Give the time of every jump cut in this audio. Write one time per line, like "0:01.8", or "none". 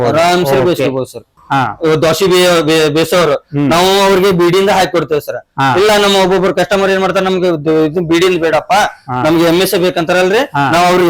0:01.3